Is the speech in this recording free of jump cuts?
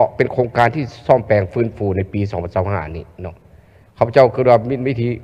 yes; 0 cuts

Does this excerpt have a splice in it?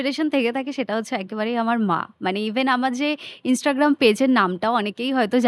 no; 0 cuts

